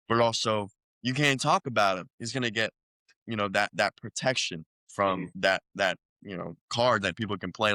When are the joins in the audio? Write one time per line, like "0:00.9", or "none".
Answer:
0:05.3
0:06.7